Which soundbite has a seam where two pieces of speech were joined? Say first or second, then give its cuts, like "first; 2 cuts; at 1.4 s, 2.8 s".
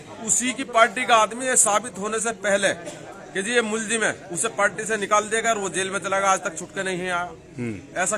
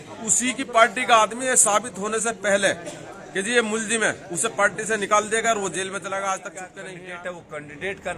second; 1 cut; at 6.8 s